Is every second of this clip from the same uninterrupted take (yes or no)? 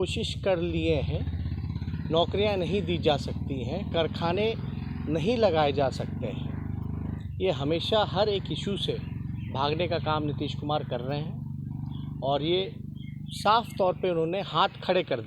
yes